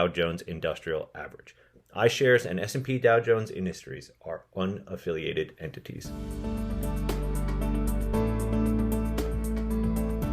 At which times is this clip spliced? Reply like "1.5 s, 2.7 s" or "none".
6.4 s